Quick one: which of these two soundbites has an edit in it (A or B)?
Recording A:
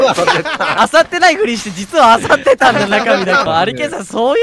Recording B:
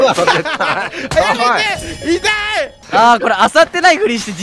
A